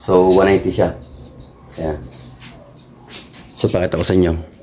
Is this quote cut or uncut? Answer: uncut